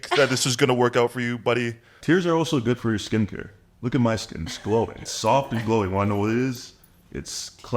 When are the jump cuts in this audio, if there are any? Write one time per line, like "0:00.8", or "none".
0:01.9
0:05.1